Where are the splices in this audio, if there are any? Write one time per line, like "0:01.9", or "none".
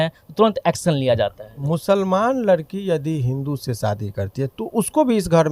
0:01.6